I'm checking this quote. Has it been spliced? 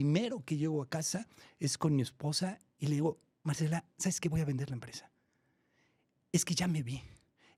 no; 0 cuts

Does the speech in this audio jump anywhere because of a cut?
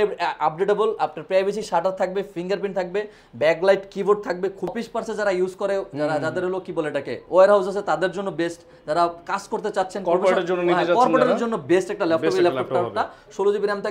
yes; 1 cut; at 4.7 s

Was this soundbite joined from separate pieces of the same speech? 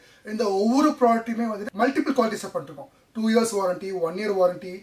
yes; 1 cut; at 1.6 s

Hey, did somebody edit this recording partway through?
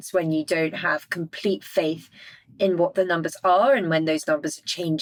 no; 0 cuts

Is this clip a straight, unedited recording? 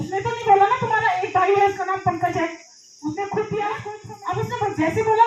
no; 1 cut; at 3.9 s

